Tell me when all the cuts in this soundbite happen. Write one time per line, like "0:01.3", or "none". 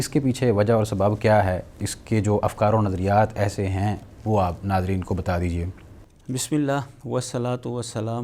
none